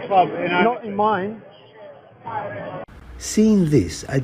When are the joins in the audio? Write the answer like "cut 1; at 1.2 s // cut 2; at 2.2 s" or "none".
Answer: cut 1; at 2.7 s